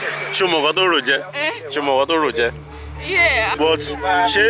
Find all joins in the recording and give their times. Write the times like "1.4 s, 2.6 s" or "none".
3.5 s